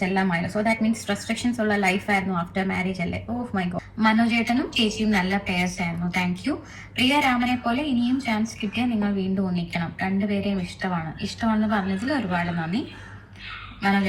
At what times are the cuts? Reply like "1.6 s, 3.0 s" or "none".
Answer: 3.8 s